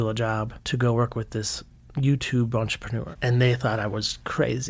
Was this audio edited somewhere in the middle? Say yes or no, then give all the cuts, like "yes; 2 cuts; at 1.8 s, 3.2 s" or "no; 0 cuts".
yes; 1 cut; at 3.0 s